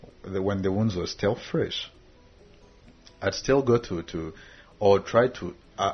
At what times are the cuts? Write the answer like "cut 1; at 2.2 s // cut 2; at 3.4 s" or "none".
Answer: none